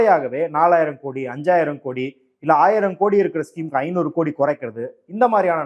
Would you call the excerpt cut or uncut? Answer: uncut